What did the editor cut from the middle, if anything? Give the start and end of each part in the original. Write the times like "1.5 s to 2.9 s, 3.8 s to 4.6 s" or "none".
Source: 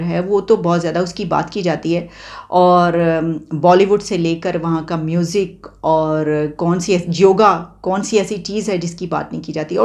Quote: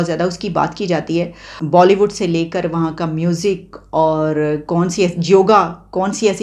2.3 s to 3.4 s